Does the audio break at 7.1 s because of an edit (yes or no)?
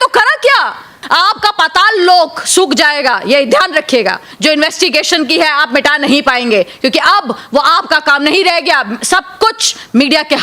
no